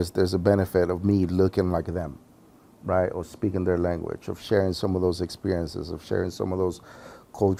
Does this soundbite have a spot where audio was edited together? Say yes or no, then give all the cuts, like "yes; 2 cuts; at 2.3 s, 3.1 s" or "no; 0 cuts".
no; 0 cuts